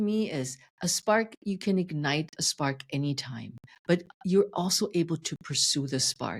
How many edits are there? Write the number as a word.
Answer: zero